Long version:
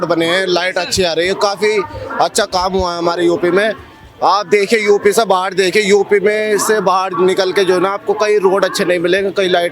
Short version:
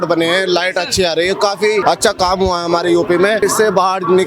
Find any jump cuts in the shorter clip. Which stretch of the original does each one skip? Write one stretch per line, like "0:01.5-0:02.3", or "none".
0:01.8-0:02.2
0:03.7-0:06.5